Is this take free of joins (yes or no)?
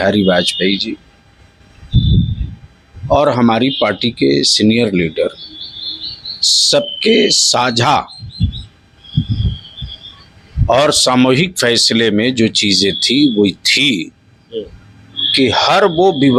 yes